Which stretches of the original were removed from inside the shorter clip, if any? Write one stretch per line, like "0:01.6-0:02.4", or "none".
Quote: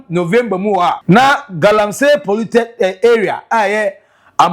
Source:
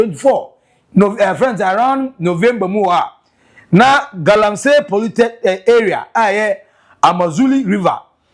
0:03.1-0:03.6